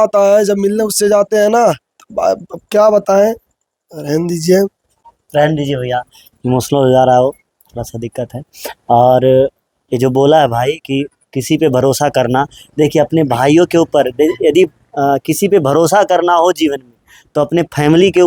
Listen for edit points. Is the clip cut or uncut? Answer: uncut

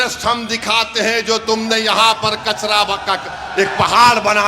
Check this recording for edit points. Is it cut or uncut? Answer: uncut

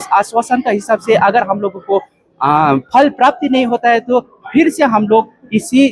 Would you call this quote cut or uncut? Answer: uncut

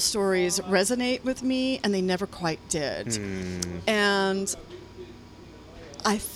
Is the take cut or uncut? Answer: uncut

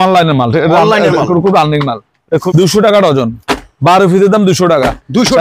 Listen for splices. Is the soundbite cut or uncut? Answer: cut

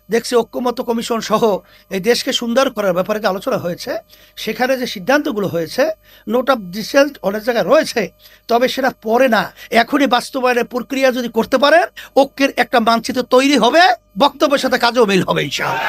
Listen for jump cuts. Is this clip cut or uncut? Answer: uncut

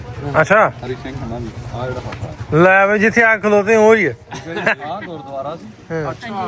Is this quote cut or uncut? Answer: uncut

